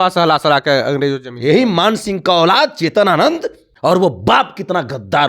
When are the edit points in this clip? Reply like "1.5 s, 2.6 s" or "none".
3.7 s